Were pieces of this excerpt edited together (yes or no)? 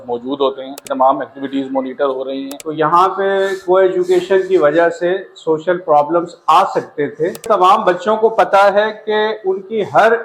yes